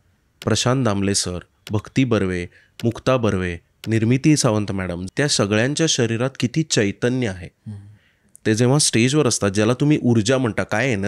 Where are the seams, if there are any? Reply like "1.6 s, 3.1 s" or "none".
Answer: 5.0 s